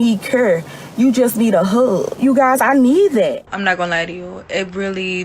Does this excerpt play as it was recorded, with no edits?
no; 2 cuts; at 2.2 s, 3.5 s

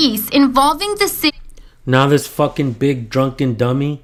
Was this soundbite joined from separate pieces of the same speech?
no; 0 cuts

